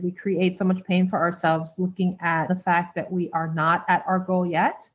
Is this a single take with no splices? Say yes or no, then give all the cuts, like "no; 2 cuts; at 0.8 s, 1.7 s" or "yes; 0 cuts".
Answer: no; 1 cut; at 2.5 s